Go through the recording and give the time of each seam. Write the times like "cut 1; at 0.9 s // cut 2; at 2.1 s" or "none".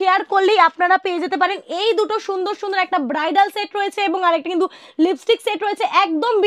none